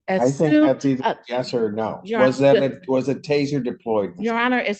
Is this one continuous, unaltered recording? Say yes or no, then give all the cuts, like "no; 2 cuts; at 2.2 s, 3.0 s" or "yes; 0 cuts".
yes; 0 cuts